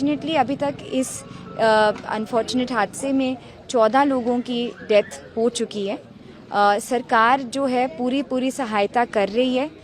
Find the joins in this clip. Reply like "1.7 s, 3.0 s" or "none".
none